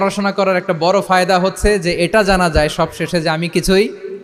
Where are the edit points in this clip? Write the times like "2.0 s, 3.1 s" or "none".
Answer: none